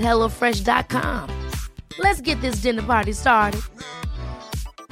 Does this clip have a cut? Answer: no; 0 cuts

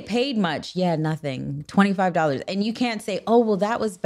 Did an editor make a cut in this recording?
no; 0 cuts

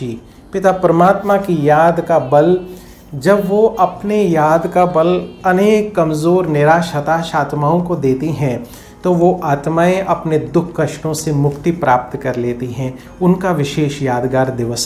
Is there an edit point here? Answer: no; 0 cuts

